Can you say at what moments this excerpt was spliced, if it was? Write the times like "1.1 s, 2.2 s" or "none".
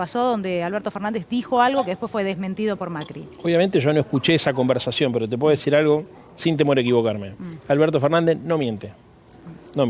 none